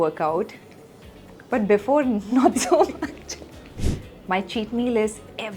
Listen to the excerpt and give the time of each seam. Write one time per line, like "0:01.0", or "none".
0:03.8